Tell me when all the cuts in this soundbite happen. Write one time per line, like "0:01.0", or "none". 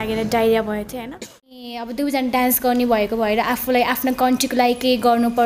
0:01.6